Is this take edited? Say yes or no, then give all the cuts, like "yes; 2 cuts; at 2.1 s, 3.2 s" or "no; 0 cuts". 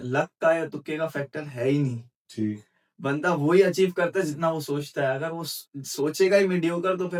no; 0 cuts